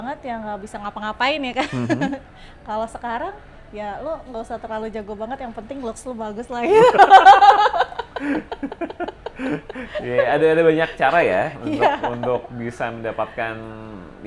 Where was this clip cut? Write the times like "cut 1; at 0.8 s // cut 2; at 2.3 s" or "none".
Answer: none